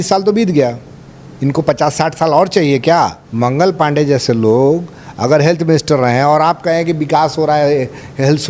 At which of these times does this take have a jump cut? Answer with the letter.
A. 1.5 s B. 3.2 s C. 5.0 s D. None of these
B